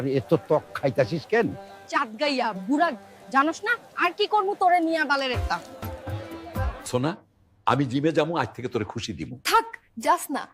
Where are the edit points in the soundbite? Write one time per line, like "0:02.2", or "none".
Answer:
0:06.8

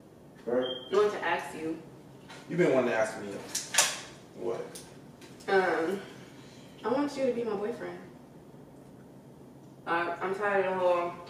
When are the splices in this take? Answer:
0:00.9

